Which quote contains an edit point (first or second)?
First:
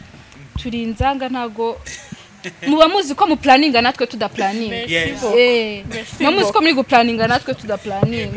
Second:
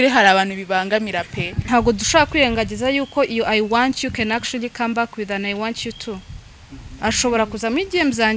second